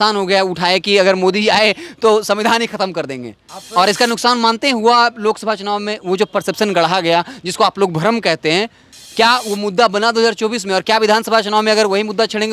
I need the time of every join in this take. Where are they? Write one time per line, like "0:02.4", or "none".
none